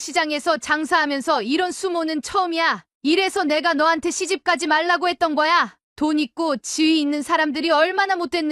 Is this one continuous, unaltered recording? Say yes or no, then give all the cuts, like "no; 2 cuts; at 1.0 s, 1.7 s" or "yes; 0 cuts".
yes; 0 cuts